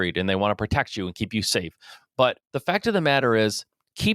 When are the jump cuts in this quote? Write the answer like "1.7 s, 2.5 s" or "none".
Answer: 2.5 s

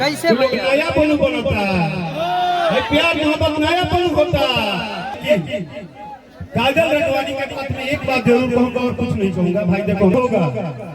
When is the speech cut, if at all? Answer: 5.2 s, 10.1 s

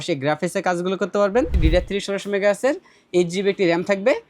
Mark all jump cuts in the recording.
1.5 s

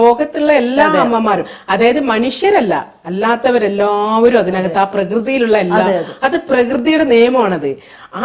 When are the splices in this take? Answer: none

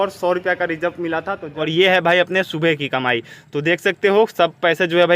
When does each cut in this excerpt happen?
1.7 s

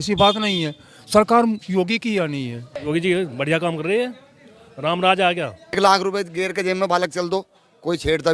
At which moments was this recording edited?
2.7 s, 5.8 s

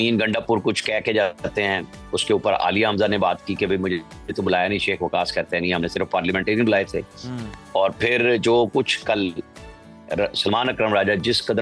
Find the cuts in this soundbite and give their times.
none

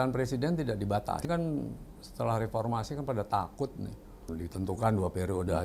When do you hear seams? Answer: 1.2 s, 4.2 s

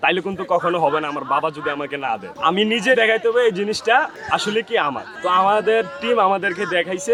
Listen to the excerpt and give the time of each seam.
none

